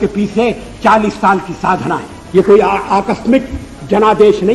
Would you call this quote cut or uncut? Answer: cut